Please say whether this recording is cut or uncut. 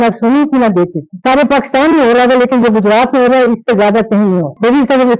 uncut